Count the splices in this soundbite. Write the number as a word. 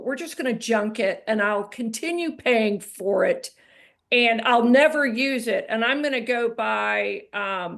zero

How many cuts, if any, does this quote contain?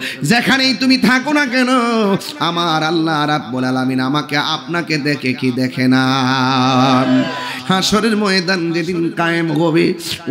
one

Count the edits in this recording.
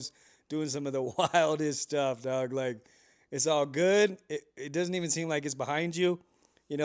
zero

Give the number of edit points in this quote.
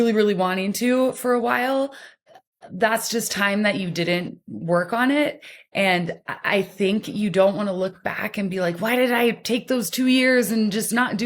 zero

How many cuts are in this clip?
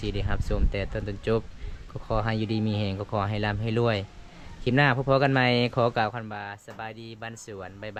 zero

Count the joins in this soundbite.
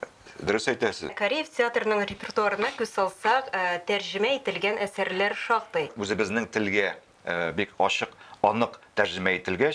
two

